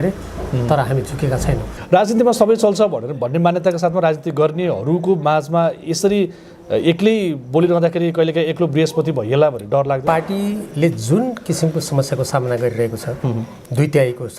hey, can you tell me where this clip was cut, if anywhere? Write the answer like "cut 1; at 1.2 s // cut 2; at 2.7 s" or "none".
cut 1; at 1.7 s // cut 2; at 10.0 s